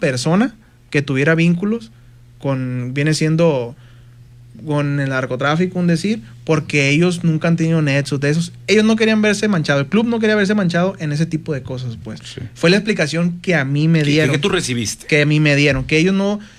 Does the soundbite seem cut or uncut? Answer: uncut